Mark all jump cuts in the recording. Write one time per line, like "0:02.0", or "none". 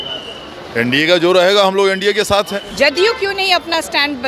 0:02.7

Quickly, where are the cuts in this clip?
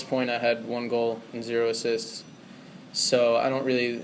none

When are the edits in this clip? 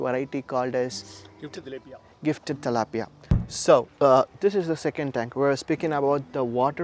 0:03.4

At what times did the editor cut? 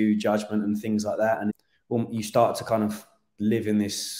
0:01.7

